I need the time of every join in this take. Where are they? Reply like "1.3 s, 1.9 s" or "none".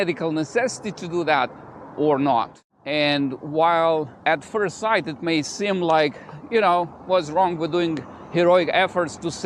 2.6 s